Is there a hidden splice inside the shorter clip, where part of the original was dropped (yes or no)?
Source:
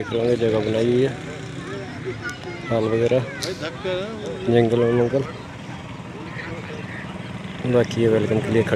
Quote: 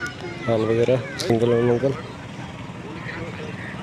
yes